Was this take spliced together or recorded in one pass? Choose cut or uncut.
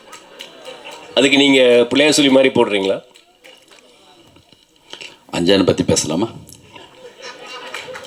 uncut